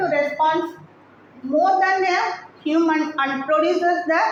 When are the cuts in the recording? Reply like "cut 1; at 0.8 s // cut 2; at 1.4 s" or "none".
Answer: none